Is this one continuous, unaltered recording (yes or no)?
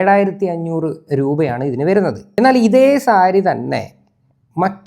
no